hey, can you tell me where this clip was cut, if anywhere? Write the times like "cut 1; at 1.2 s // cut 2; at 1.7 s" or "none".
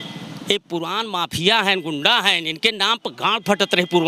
none